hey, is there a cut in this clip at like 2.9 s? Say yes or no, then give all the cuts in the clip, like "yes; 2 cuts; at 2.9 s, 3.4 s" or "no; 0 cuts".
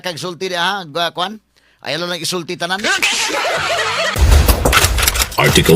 no; 1 cut; at 4.2 s